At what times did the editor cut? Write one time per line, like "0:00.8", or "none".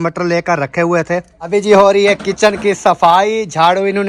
0:01.4